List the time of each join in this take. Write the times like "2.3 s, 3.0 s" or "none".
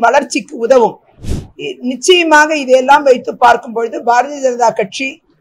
1.1 s